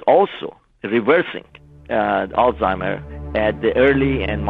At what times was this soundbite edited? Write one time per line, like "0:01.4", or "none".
none

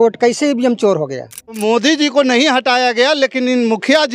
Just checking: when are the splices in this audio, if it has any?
0:01.6

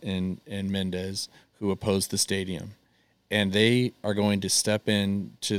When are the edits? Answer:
none

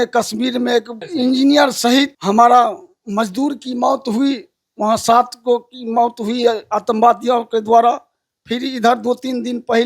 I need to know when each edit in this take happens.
0:01.0
0:02.2

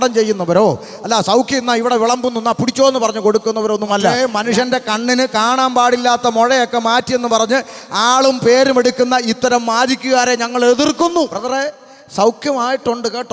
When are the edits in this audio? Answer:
0:04.2
0:11.3

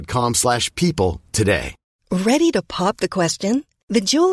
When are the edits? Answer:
0:01.9

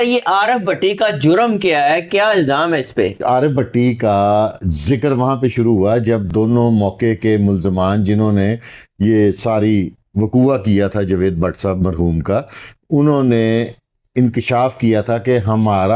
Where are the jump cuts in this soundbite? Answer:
none

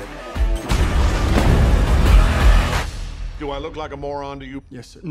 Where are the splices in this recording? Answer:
0:03.0

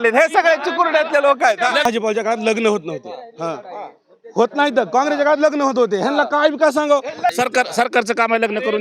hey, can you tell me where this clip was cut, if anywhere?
0:01.9
0:07.3

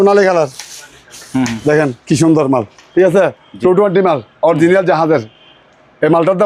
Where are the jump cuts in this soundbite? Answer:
none

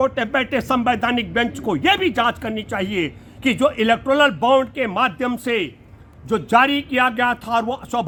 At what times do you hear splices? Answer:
none

